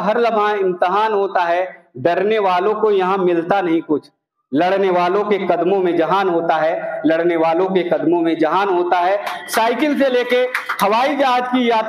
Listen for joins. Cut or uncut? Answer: uncut